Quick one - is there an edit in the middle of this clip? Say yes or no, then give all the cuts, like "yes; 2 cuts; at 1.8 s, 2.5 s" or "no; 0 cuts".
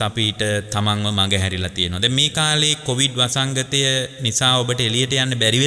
no; 0 cuts